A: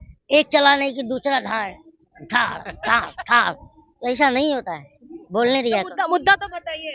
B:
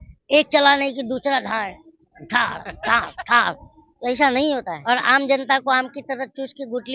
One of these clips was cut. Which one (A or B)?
B